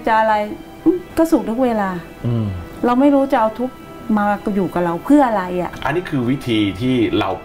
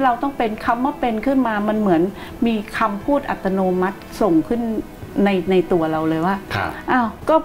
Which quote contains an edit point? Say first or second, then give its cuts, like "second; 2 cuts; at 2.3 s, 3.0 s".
first; 3 cuts; at 1.1 s, 2.6 s, 5.7 s